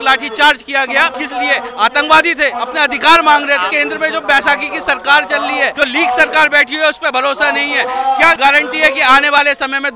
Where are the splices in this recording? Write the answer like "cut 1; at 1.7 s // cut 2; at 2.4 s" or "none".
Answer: cut 1; at 1.2 s // cut 2; at 2.6 s // cut 3; at 3.7 s // cut 4; at 5.7 s // cut 5; at 8.4 s